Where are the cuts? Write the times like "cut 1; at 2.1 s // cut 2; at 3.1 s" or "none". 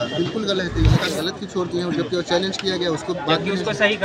cut 1; at 1.0 s